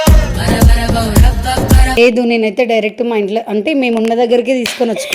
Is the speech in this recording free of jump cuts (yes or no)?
no